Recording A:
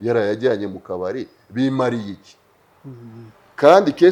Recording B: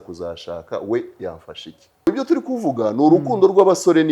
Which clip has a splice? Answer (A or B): B